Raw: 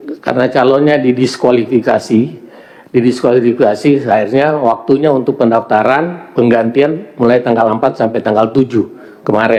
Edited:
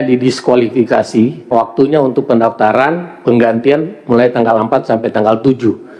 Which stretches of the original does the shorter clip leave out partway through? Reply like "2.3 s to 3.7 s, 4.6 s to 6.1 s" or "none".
2.4 s to 4.6 s